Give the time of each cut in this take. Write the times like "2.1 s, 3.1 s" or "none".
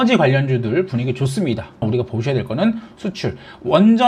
1.8 s, 2.9 s